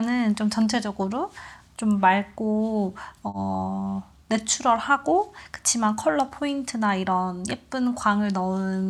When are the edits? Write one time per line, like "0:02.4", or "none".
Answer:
none